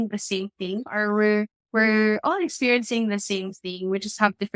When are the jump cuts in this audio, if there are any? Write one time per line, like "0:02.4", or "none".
0:01.6